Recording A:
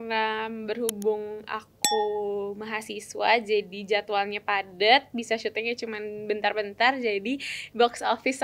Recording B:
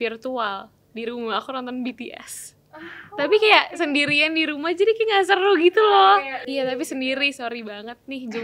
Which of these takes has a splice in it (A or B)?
B